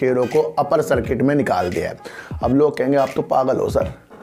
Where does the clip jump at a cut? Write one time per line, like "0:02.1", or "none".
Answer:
none